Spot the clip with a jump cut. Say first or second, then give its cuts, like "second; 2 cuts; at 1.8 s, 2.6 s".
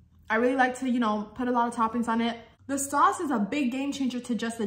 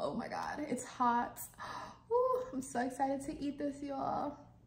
first; 1 cut; at 2.5 s